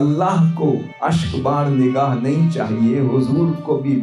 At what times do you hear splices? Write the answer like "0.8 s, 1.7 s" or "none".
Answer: 0.9 s